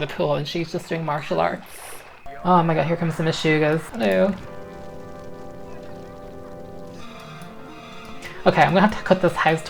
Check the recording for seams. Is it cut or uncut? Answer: cut